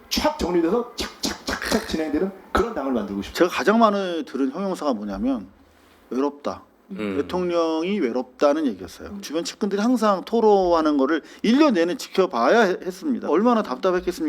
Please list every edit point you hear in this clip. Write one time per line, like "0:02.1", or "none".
0:03.2
0:09.2
0:13.3

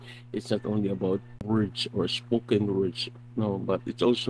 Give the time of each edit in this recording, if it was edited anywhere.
0:01.3

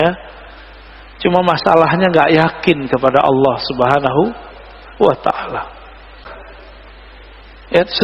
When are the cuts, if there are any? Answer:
0:06.3

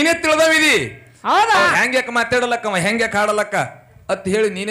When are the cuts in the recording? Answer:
none

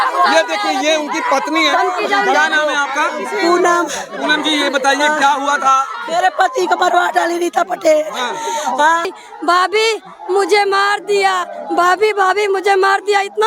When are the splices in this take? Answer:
0:09.2

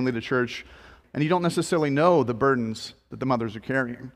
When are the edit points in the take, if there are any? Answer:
0:00.9

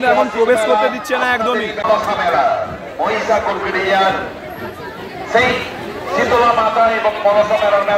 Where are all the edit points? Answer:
0:01.8

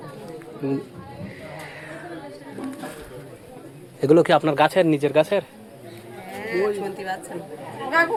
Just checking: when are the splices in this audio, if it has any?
none

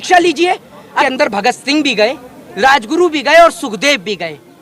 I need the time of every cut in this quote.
0:01.0

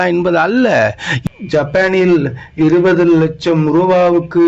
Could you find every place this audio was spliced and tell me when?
0:01.1

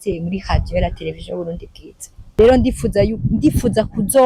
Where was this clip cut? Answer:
0:02.2

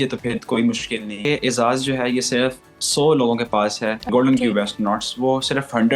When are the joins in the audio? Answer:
0:01.2
0:04.1

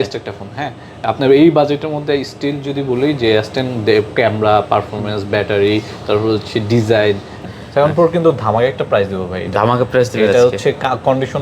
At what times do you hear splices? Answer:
0:07.3

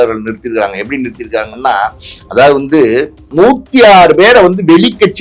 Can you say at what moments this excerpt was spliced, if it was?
0:03.3

